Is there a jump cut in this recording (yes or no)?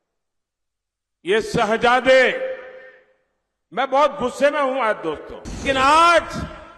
yes